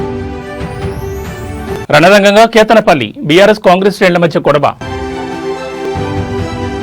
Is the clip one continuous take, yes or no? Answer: yes